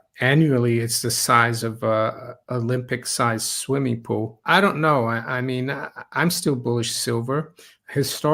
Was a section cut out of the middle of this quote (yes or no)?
yes